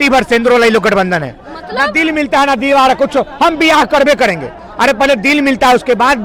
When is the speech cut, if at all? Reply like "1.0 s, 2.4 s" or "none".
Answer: none